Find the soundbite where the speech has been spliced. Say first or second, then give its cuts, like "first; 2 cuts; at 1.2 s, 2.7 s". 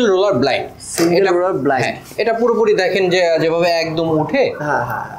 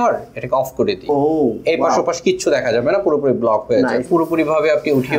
second; 1 cut; at 4.0 s